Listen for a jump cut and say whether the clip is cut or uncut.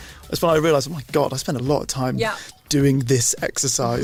uncut